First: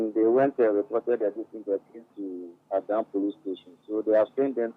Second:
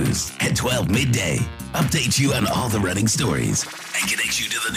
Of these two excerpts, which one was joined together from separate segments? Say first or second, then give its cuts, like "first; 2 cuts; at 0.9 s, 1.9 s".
first; 1 cut; at 2.5 s